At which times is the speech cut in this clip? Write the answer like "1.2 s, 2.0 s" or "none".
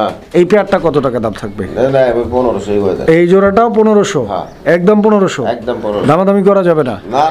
none